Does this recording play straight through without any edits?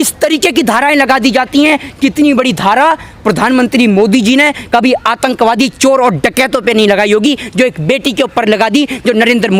yes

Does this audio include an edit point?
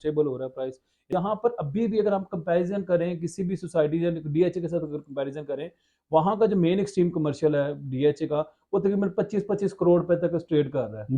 yes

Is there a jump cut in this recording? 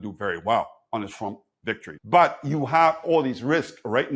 yes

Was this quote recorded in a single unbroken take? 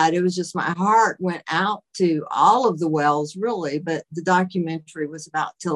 yes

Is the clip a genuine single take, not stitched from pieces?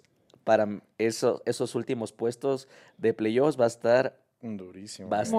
yes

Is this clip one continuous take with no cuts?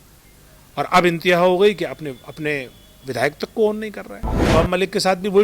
no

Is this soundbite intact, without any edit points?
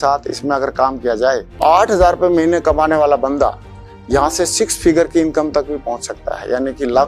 no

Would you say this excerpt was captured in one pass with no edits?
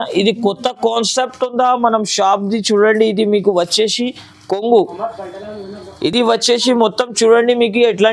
yes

